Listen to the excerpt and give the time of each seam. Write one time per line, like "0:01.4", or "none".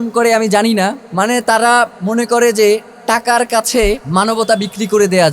0:01.0
0:04.0